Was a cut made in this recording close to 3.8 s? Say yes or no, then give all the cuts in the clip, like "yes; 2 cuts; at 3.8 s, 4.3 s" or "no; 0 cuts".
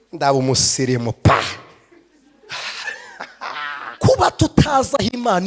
yes; 1 cut; at 3.8 s